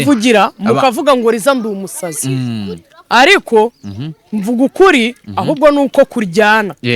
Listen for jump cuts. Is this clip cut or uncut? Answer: uncut